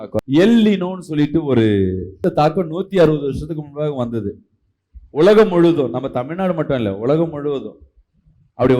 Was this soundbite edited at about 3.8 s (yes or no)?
no